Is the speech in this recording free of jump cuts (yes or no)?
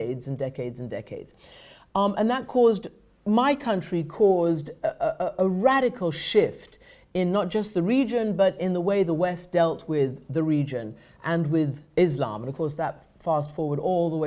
yes